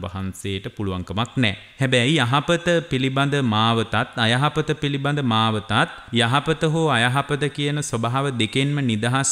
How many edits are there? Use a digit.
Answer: 2